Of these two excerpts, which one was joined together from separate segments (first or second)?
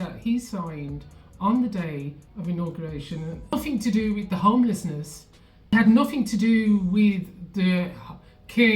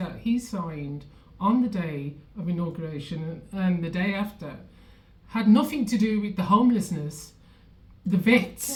first